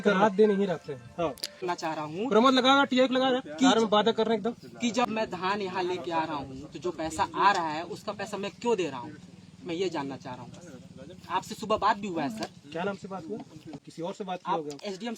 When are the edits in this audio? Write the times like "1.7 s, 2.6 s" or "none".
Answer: 1.6 s, 5.1 s, 13.7 s